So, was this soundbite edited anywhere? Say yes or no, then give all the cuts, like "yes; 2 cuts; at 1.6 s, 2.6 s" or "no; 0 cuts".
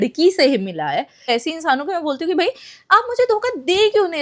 yes; 1 cut; at 1.3 s